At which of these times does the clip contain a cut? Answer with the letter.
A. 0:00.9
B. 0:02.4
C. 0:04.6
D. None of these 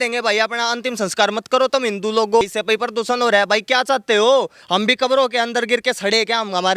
B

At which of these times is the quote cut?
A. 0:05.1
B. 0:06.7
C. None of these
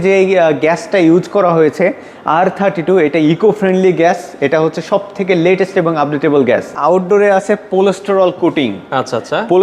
B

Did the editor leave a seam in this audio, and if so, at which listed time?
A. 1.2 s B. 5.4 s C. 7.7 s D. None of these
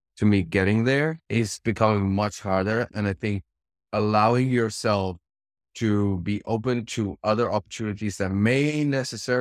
A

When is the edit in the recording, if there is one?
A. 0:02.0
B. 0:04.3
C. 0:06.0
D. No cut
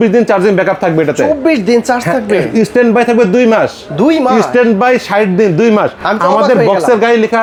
D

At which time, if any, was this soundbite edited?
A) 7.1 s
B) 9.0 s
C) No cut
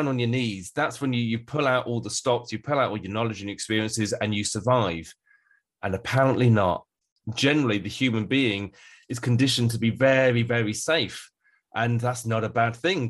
A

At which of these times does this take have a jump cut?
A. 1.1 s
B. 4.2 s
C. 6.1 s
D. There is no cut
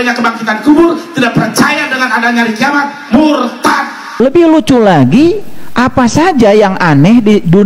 B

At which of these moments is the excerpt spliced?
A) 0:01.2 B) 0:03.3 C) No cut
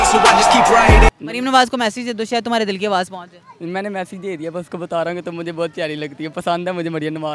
A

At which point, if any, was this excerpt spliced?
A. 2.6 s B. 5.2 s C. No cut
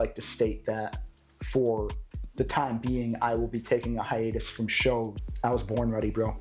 B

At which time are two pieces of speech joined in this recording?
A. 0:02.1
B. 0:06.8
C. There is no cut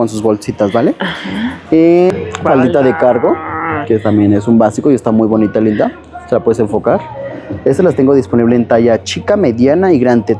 A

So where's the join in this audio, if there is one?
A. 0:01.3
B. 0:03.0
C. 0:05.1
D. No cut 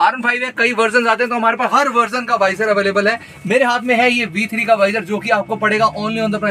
D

